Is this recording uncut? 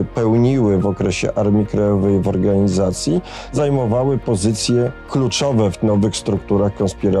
no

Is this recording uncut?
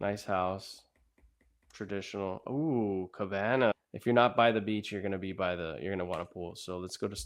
no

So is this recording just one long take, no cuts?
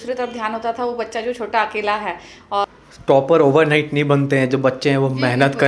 no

